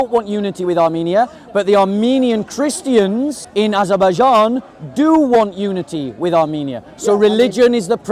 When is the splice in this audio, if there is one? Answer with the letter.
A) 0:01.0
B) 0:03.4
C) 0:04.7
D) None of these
B